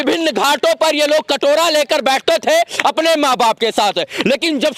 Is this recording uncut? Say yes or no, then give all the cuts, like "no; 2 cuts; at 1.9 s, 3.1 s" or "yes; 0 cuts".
yes; 0 cuts